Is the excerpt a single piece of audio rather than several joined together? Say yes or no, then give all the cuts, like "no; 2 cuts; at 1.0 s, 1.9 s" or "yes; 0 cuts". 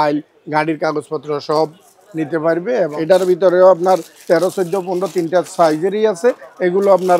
no; 1 cut; at 3.0 s